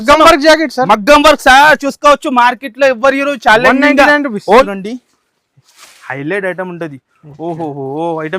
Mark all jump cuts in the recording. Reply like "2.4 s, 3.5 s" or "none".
4.6 s